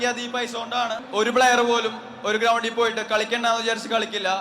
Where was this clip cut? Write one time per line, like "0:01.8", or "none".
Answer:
0:01.0

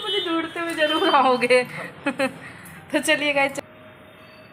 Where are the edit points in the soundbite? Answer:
0:03.5

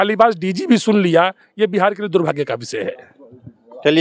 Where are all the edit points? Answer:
none

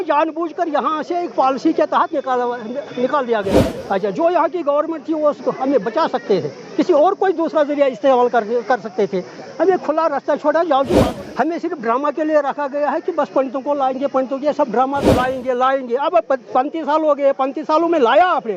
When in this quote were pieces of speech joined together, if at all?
0:03.7
0:11.1
0:15.2

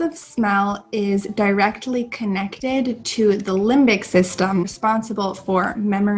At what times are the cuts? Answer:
0:04.7

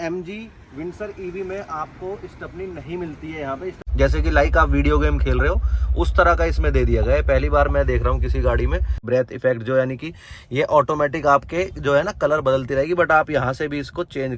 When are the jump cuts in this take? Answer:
0:03.8
0:09.0

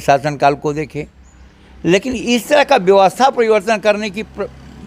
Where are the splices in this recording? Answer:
none

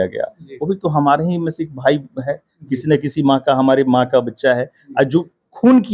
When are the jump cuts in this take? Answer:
none

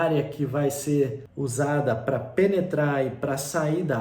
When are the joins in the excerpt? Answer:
0:01.3

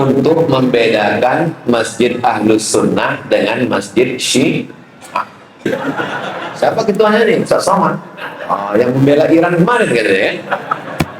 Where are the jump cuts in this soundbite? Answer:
0:05.7

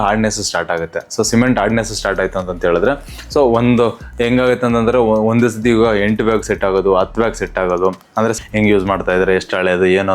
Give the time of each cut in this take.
0:08.4

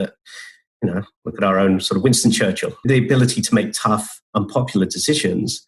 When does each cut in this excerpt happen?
0:02.8

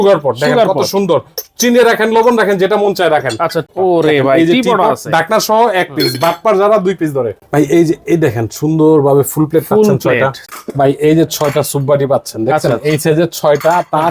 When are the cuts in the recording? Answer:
0:03.6
0:10.5

